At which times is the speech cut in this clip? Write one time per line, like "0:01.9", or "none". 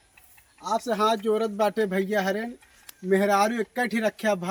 none

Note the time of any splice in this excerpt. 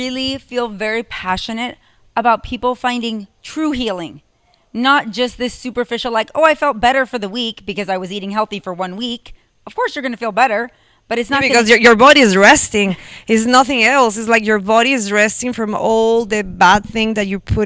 none

